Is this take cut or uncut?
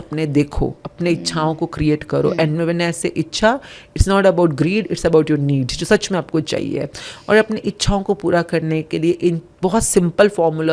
uncut